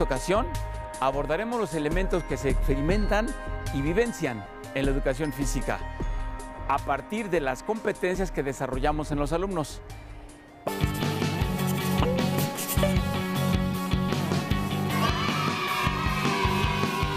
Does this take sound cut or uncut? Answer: uncut